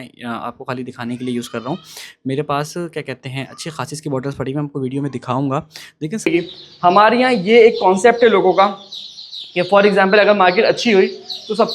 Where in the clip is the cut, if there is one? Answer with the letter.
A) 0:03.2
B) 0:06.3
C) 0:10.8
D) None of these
B